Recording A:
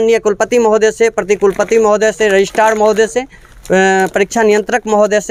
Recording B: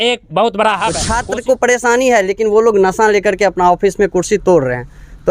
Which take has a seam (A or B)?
B